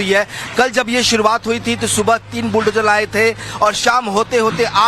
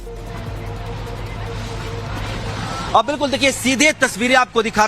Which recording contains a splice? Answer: second; 1 cut; at 1.0 s

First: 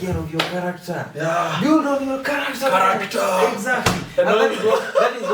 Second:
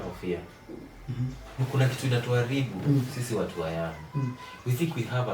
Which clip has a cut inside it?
second; 1 cut; at 1.6 s

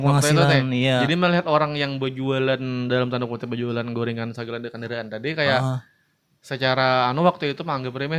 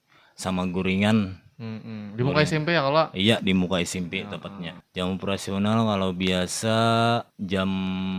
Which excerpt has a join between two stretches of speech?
second; 2 cuts; at 4.8 s, 7.3 s

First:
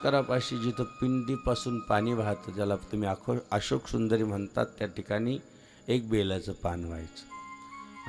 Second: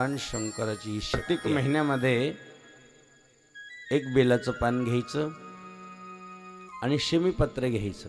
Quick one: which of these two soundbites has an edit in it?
second; 1 cut; at 1.2 s

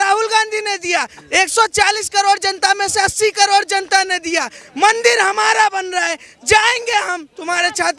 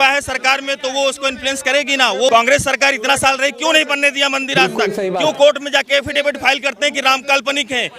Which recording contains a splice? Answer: second; 1 cut; at 2.3 s

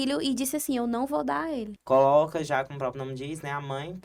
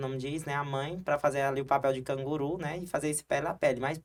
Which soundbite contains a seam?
first; 1 cut; at 1.7 s

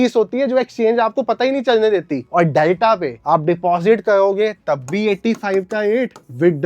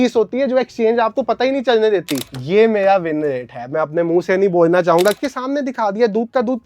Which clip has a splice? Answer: second; 2 cuts; at 2.2 s, 5.2 s

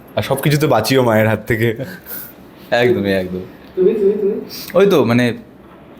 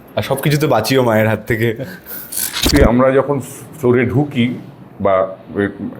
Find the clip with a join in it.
second; 1 cut; at 2.7 s

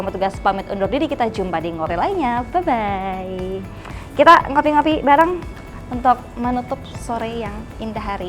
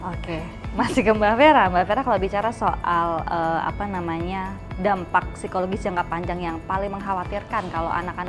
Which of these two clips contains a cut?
first; 1 cut; at 1.9 s

